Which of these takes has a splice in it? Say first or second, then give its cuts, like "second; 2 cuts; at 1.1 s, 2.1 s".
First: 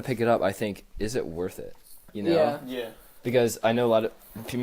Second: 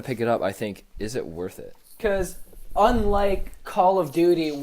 second; 1 cut; at 1.9 s